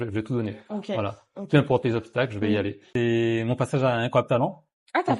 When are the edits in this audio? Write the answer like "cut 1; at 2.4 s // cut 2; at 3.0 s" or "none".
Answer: cut 1; at 2.8 s